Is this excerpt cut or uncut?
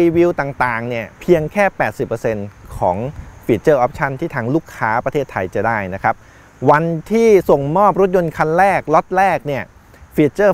uncut